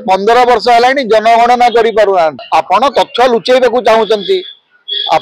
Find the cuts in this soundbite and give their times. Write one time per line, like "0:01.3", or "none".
0:02.4